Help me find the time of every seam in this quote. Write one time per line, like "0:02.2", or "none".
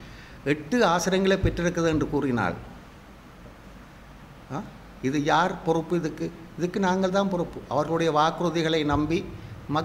none